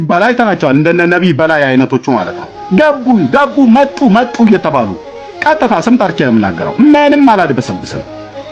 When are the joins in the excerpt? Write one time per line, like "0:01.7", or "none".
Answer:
none